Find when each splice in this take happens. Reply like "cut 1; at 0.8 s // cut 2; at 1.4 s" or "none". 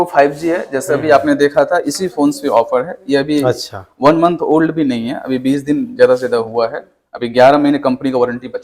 none